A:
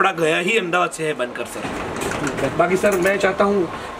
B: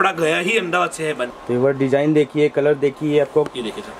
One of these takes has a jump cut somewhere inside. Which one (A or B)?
B